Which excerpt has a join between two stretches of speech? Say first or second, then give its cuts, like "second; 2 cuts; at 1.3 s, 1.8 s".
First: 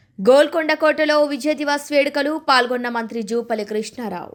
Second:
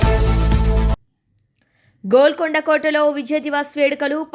second; 1 cut; at 0.9 s